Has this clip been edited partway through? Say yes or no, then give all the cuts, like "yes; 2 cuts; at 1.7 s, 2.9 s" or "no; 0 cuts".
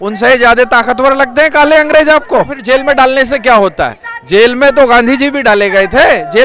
yes; 1 cut; at 2.6 s